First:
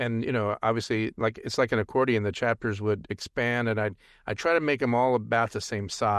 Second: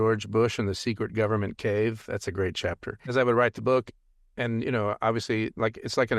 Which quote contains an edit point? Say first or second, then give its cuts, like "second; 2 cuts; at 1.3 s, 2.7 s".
second; 1 cut; at 3.1 s